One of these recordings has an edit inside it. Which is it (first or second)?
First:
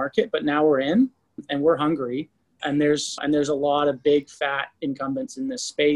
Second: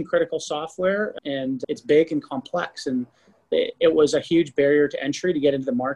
first